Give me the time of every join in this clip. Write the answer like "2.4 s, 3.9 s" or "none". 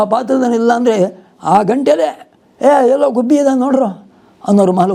none